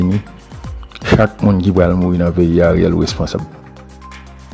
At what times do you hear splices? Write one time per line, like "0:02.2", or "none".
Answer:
0:03.4